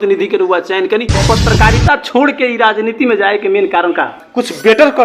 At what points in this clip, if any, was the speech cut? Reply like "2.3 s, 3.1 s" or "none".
1.2 s, 4.2 s